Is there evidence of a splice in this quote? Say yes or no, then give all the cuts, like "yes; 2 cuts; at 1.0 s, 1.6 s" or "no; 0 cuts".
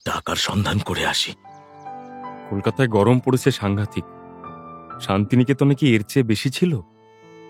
yes; 1 cut; at 2.0 s